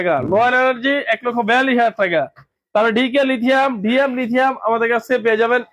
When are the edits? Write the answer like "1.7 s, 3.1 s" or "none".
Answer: none